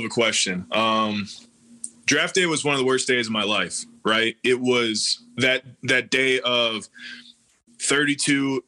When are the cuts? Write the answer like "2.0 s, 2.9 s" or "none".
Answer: none